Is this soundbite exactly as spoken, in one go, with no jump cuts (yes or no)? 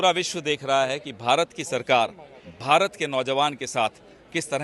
yes